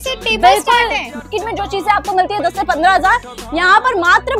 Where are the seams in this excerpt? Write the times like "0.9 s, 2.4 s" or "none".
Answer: 1.1 s

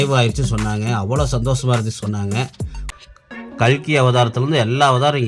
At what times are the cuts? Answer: 2.9 s

